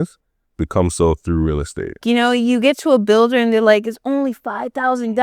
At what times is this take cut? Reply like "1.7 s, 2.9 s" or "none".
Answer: 2.0 s